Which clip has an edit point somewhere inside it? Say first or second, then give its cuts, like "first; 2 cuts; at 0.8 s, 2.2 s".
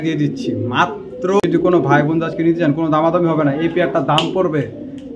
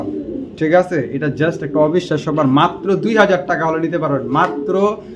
first; 1 cut; at 1.4 s